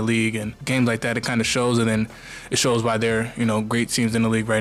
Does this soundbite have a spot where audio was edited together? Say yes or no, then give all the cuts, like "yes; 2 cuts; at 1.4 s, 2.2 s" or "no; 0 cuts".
no; 0 cuts